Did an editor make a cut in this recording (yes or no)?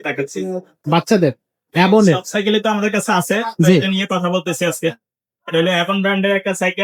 no